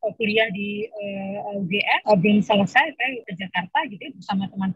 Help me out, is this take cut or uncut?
cut